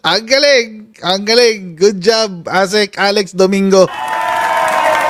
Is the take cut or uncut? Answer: uncut